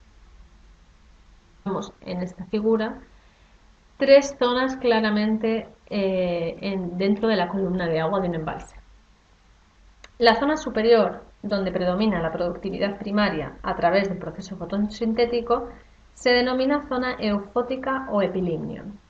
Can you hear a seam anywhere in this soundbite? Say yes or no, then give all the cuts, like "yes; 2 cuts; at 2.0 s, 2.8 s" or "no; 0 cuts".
no; 0 cuts